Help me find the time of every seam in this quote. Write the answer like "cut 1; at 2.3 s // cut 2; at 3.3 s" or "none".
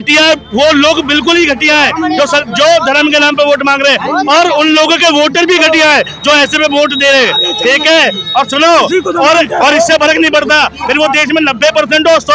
none